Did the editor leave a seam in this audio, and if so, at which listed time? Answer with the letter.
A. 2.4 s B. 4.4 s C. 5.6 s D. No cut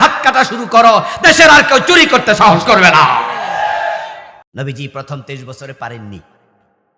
B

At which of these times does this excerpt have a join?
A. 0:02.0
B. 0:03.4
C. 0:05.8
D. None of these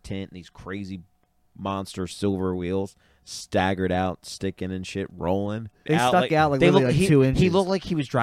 C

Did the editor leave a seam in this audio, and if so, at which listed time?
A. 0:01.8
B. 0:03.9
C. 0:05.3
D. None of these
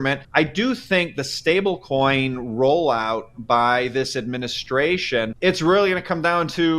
C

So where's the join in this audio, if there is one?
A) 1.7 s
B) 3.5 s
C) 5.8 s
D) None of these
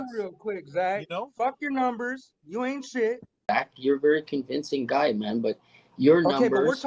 B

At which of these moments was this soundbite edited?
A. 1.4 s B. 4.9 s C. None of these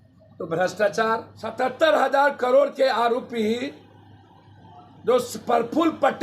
A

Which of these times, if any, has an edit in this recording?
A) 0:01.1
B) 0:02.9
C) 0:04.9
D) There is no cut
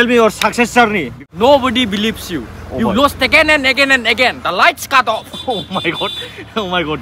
A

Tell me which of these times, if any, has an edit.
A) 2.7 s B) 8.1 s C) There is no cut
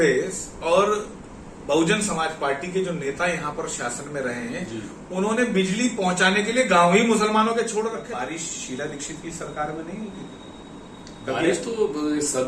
B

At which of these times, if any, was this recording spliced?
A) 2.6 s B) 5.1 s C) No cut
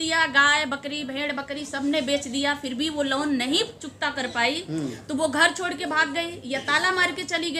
C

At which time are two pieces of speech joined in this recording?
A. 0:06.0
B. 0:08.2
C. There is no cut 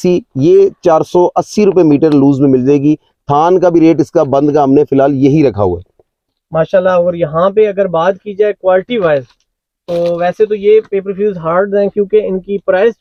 C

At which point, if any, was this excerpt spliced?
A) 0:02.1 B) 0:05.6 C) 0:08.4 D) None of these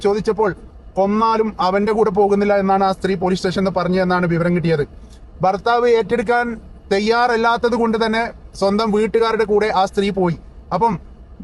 B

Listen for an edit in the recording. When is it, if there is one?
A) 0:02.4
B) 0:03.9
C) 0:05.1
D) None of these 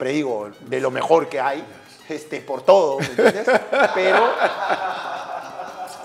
D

